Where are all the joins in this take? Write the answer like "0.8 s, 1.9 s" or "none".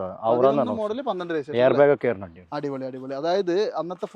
none